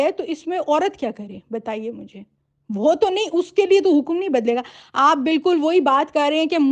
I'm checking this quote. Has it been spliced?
no; 0 cuts

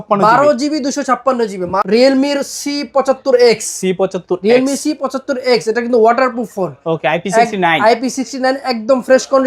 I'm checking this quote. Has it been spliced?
yes; 1 cut; at 1.8 s

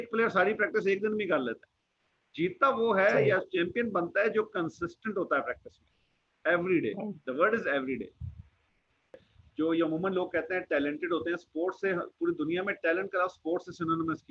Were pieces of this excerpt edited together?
no; 0 cuts

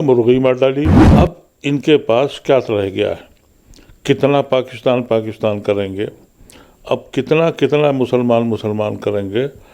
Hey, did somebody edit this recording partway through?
yes; 1 cut; at 1.0 s

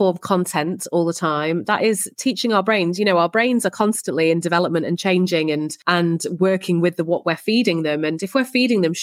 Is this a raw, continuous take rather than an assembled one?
no; 1 cut; at 5.8 s

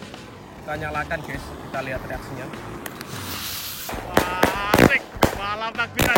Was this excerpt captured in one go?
no; 1 cut; at 4.0 s

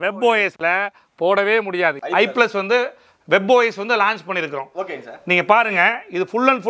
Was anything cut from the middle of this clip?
yes; 1 cut; at 2.0 s

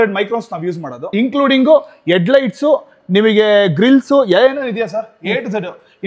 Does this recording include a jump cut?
yes; 1 cut; at 1.1 s

